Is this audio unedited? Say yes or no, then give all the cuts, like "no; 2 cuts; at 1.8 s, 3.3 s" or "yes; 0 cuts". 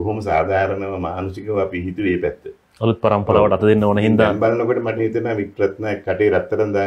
yes; 0 cuts